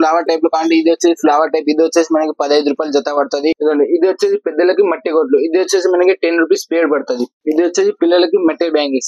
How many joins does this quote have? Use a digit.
2